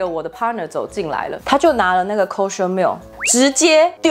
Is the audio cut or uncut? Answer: cut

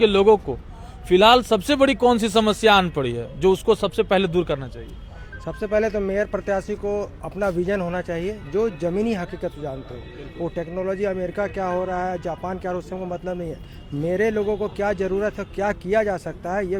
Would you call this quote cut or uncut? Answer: uncut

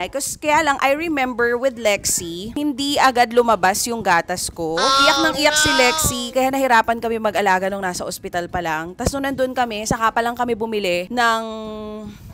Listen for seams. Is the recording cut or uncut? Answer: uncut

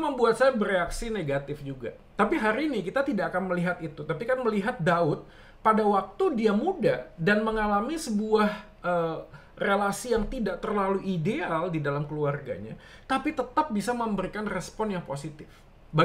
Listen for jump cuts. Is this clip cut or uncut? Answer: uncut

